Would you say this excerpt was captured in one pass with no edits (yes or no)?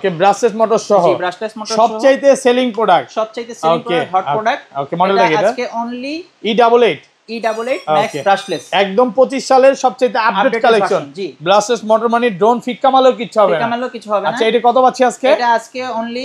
yes